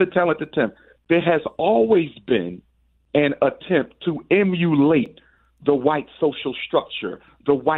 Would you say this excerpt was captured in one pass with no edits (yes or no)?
yes